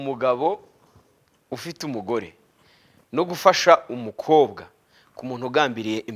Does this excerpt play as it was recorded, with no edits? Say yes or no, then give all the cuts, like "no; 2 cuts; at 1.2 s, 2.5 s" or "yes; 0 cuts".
yes; 0 cuts